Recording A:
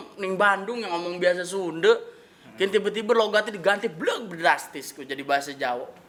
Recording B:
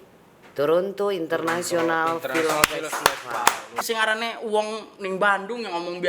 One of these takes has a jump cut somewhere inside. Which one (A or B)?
B